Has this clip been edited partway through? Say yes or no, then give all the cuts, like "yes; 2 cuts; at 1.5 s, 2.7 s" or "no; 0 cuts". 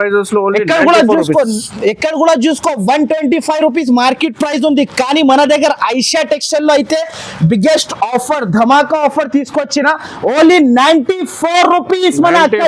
no; 0 cuts